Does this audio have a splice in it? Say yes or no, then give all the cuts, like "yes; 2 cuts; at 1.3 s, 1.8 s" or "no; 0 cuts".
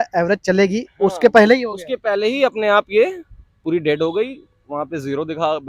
no; 0 cuts